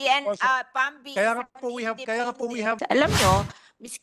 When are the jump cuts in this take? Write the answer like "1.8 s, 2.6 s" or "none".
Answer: 2.8 s